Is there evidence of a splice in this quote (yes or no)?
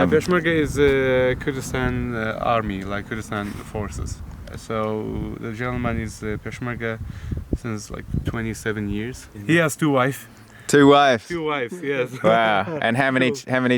yes